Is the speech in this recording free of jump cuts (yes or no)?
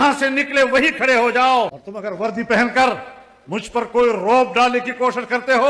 no